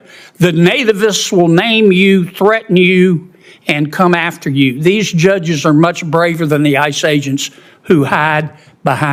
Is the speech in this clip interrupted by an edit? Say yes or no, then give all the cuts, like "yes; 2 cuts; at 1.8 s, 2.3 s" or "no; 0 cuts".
no; 0 cuts